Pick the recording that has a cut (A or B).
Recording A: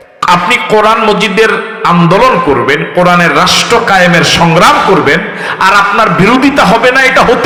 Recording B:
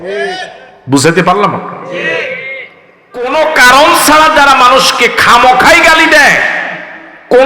B